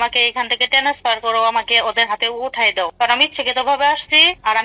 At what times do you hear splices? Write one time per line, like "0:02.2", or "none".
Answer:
0:02.9

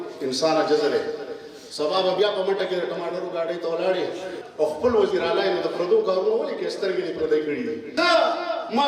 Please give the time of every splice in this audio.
0:04.4
0:07.8

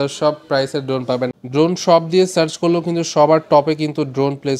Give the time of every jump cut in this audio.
0:01.4

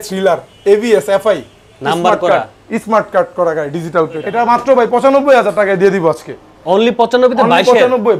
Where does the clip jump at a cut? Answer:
0:04.3

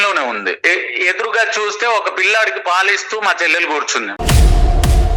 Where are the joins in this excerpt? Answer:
none

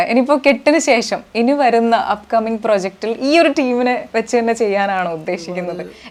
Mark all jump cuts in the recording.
none

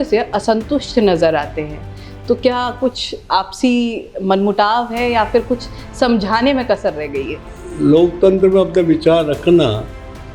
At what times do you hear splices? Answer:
0:07.4

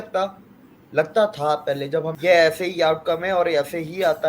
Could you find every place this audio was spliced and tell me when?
0:02.1

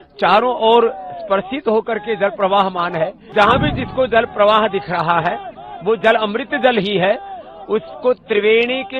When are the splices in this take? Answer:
0:03.2

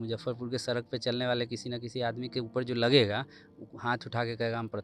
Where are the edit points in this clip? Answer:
none

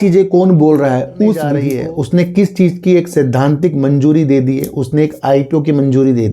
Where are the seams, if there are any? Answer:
0:01.6

